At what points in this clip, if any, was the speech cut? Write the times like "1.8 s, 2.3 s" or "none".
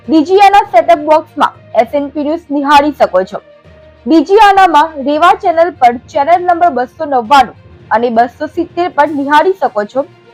none